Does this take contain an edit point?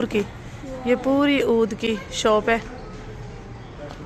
no; 0 cuts

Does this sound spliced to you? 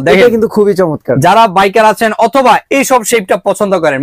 no; 0 cuts

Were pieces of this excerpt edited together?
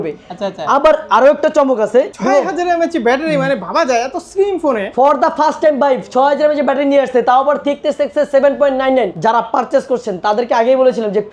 yes; 2 cuts; at 2.2 s, 9.1 s

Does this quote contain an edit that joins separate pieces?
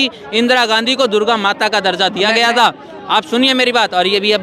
no; 0 cuts

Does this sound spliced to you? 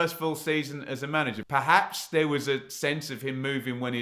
yes; 1 cut; at 1.4 s

